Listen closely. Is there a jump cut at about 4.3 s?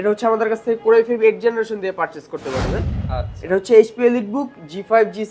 no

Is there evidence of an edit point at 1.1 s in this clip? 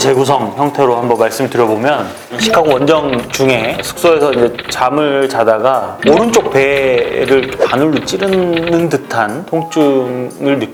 no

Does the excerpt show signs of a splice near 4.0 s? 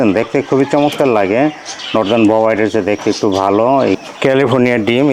yes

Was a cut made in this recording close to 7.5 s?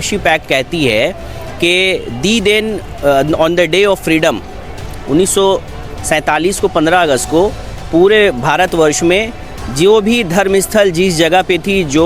no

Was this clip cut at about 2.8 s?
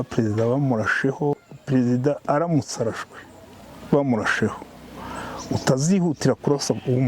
no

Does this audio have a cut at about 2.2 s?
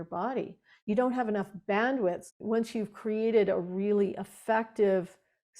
yes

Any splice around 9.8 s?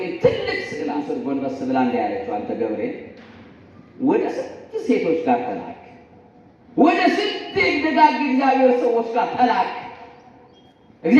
no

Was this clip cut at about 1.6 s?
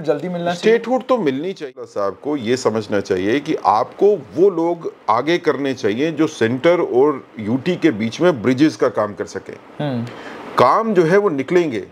yes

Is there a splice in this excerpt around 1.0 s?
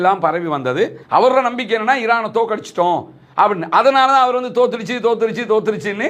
yes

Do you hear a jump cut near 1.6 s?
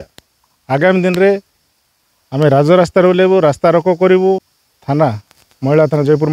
no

